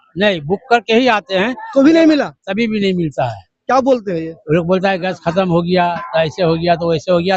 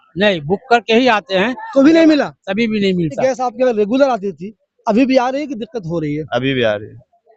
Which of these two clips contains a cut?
second; 1 cut; at 3.2 s

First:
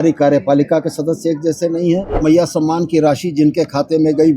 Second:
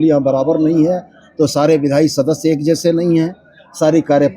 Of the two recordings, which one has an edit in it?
first; 1 cut; at 2.1 s

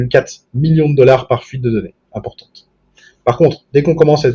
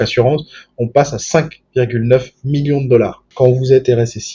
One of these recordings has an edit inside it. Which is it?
second; 1 cut; at 3.2 s

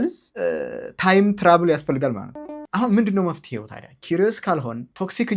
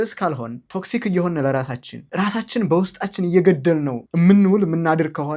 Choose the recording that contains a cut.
first; 1 cut; at 2.3 s

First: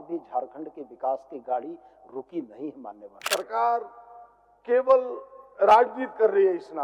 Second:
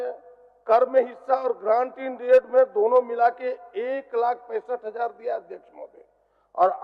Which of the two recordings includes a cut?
first; 1 cut; at 3.2 s

